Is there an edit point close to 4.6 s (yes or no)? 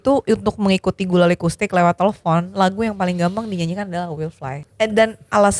yes